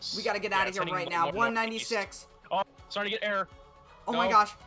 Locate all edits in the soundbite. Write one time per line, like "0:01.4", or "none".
none